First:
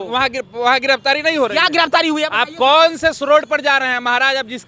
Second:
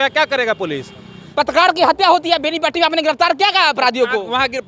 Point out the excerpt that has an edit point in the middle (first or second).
second